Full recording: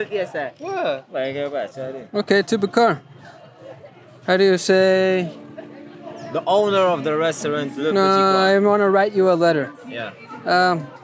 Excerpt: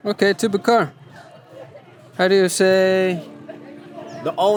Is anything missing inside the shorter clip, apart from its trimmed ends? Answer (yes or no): no